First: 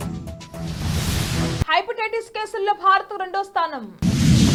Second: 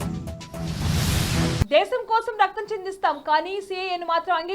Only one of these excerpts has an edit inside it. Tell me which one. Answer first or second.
second